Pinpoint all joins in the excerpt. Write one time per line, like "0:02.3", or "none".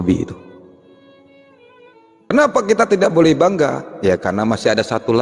0:02.3